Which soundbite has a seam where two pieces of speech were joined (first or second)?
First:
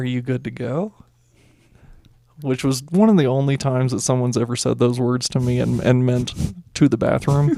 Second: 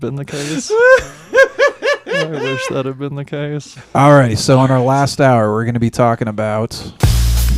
second